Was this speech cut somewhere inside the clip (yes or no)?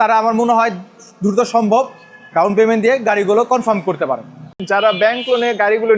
yes